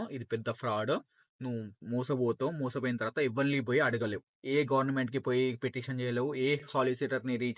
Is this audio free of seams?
yes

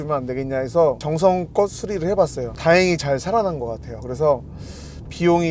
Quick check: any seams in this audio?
yes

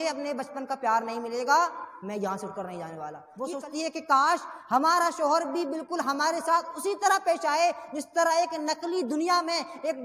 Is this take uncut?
no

